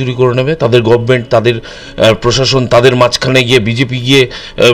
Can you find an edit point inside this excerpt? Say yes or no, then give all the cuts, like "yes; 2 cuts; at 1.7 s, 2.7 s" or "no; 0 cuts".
no; 0 cuts